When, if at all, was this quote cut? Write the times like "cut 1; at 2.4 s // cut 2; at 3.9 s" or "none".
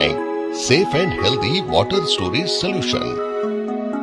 none